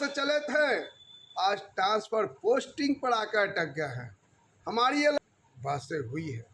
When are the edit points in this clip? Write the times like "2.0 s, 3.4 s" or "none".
5.2 s